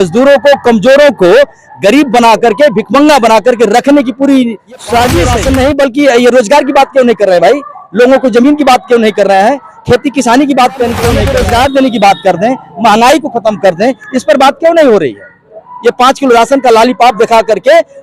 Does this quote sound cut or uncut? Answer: cut